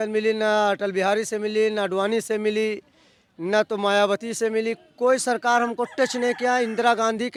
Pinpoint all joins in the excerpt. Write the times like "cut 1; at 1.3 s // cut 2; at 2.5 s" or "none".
none